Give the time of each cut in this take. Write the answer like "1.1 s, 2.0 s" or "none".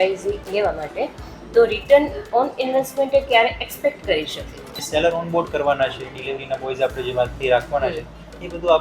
4.8 s